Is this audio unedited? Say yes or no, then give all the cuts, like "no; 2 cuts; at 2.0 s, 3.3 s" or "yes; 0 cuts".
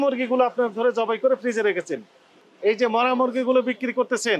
no; 1 cut; at 2.4 s